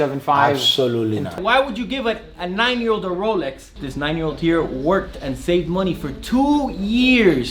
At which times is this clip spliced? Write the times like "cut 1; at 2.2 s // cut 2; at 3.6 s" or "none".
cut 1; at 1.4 s // cut 2; at 3.7 s